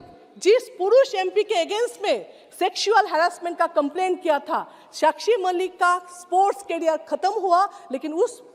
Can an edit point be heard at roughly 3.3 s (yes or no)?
no